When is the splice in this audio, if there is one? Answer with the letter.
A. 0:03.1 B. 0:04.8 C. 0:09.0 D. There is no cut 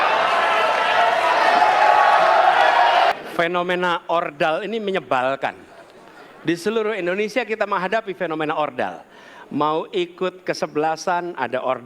A